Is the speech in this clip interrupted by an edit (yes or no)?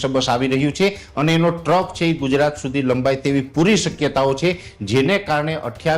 no